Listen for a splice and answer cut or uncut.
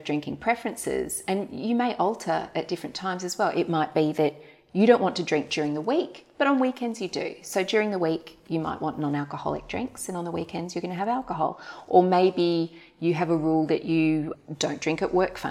uncut